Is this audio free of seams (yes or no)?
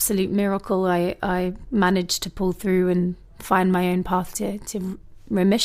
yes